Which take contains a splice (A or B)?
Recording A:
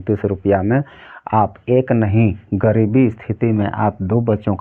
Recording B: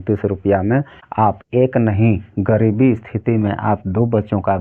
B